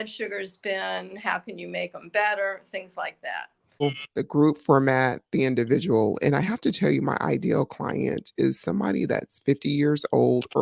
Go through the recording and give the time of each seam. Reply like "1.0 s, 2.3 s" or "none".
3.8 s